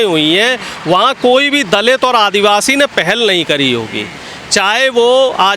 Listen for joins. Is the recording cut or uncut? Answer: uncut